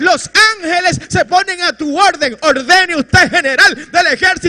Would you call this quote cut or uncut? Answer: cut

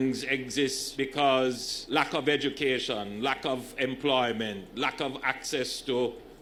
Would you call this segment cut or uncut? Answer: uncut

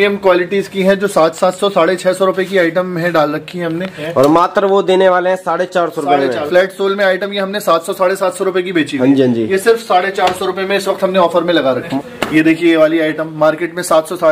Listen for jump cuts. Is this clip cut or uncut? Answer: cut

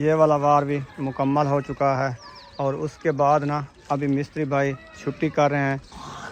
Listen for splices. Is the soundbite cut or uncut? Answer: uncut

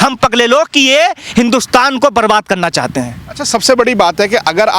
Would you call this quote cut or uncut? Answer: uncut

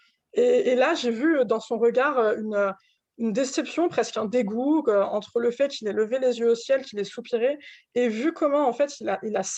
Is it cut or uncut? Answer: uncut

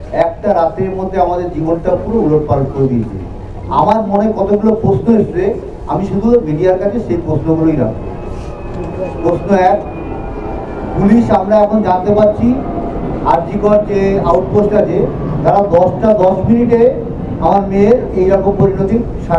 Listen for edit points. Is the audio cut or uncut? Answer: uncut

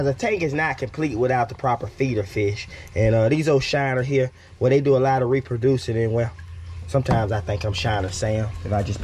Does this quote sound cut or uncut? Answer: uncut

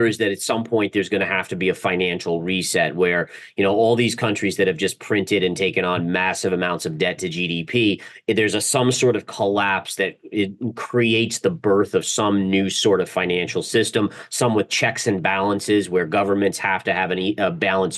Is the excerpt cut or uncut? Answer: uncut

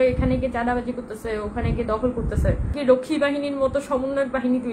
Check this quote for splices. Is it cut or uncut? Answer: cut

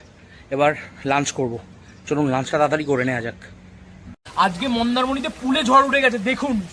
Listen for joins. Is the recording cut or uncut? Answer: cut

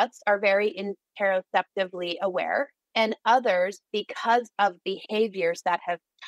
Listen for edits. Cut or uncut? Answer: cut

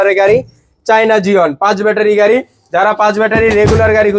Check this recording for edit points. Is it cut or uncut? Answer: uncut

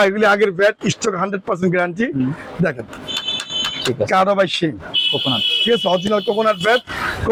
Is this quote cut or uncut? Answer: uncut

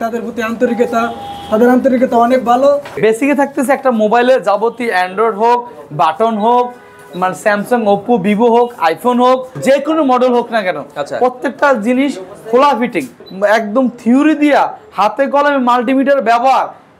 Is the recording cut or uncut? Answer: cut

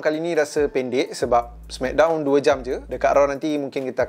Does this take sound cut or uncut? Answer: uncut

